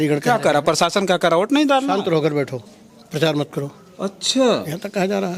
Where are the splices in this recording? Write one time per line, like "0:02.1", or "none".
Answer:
none